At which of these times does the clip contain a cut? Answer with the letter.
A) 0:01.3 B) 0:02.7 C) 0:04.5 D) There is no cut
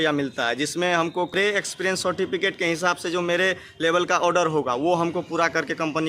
A